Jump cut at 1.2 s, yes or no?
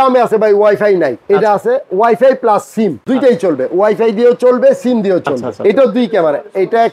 yes